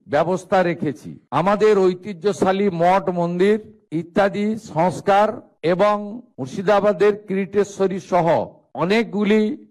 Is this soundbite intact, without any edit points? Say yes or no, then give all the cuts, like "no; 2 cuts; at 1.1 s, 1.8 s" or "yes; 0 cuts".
yes; 0 cuts